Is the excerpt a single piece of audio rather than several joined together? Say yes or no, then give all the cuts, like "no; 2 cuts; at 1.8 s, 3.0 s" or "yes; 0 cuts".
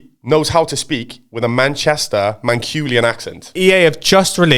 no; 1 cut; at 3.5 s